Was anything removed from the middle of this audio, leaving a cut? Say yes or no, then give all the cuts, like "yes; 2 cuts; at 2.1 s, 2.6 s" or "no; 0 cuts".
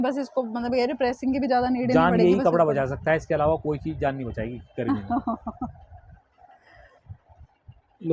no; 0 cuts